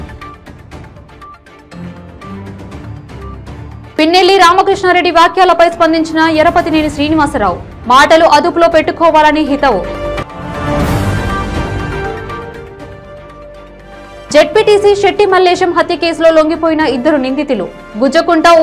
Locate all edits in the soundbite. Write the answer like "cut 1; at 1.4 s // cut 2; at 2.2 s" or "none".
cut 1; at 2.0 s